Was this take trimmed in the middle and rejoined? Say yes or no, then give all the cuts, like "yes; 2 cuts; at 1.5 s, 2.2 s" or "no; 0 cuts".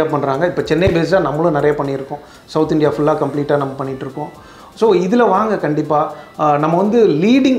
no; 0 cuts